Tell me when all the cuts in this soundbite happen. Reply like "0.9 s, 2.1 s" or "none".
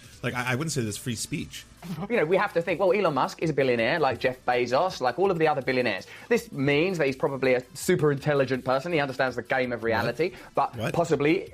1.9 s